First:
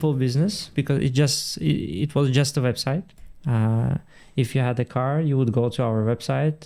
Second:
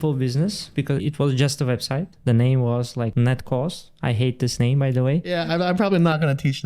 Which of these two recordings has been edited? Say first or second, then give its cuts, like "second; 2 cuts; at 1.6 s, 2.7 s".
second; 4 cuts; at 1.0 s, 2.1 s, 3.1 s, 5.3 s